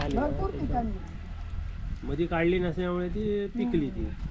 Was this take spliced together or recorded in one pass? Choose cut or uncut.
uncut